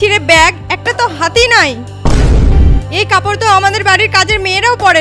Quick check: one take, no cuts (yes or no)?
no